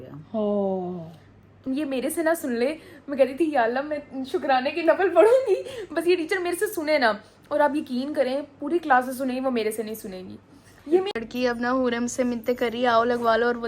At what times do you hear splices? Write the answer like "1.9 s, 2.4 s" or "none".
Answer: 1.6 s, 11.1 s